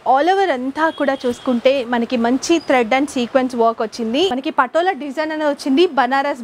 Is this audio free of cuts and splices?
no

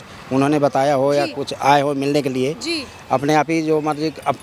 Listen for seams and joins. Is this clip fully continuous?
yes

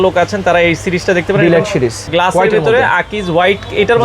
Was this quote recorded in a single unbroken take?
no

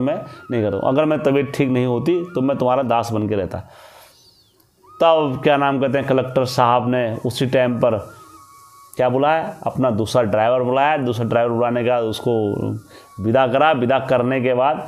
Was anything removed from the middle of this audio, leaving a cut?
no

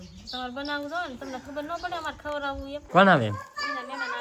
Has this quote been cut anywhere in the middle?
yes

